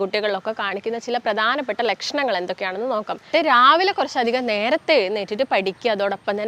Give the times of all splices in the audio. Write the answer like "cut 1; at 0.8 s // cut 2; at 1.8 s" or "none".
cut 1; at 3.3 s